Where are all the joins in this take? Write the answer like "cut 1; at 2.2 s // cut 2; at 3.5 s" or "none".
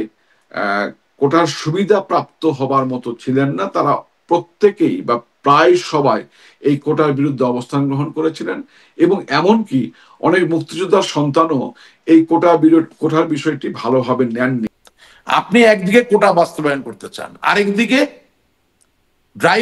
cut 1; at 14.7 s